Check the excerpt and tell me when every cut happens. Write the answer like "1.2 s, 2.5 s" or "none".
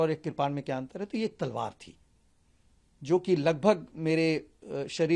none